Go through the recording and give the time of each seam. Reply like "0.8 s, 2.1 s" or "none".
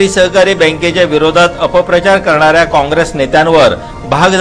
none